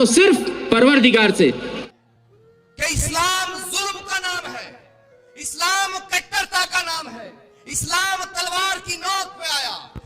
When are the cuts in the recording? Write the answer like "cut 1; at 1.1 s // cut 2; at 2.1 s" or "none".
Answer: cut 1; at 1.7 s